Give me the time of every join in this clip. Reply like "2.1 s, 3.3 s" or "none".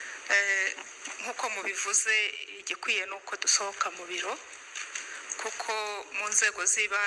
none